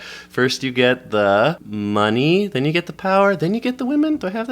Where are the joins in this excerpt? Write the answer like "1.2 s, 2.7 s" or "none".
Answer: 1.7 s